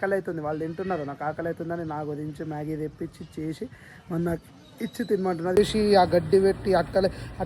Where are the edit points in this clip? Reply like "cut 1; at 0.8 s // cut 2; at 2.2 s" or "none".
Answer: cut 1; at 5.6 s